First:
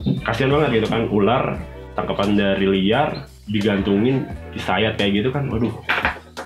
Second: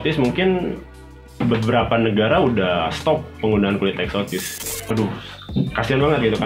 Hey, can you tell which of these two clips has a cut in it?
second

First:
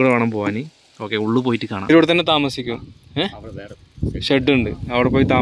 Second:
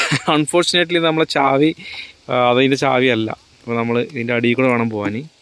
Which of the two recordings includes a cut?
first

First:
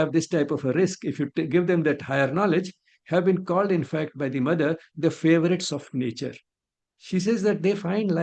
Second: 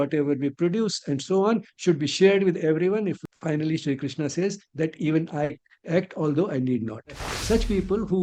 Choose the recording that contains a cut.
second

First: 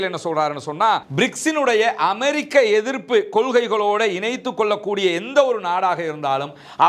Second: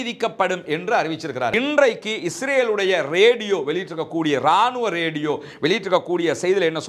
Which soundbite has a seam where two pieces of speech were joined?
second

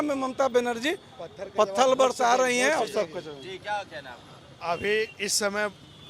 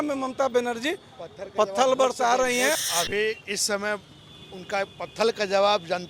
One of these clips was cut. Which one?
second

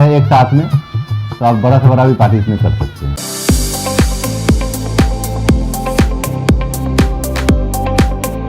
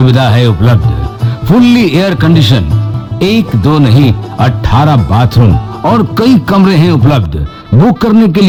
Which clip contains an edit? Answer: first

